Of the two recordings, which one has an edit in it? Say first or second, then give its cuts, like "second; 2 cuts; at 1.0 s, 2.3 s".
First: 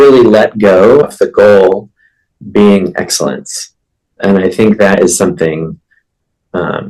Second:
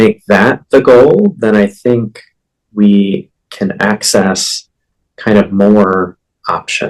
first; 1 cut; at 1.1 s